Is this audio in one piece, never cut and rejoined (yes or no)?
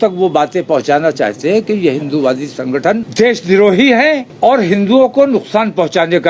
no